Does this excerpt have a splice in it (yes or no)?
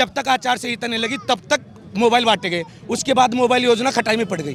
no